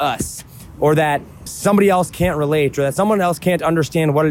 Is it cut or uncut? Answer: cut